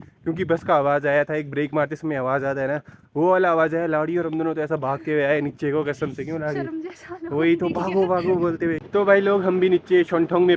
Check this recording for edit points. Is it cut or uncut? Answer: cut